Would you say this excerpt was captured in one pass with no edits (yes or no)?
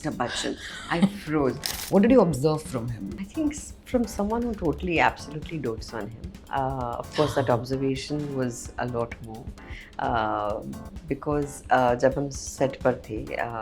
no